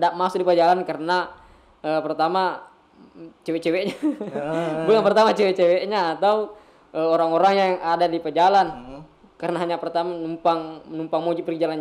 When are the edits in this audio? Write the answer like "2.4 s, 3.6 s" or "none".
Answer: none